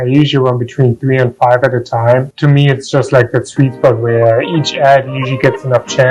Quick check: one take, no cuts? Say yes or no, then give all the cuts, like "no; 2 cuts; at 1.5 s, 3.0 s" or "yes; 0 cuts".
yes; 0 cuts